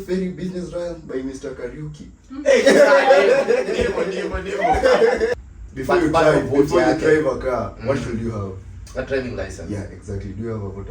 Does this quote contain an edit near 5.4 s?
yes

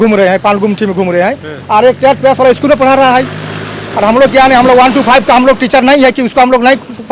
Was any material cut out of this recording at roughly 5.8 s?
no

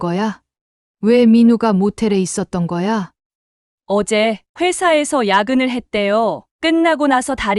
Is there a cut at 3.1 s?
yes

